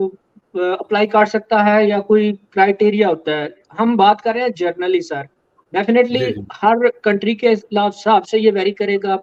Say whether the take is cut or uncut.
uncut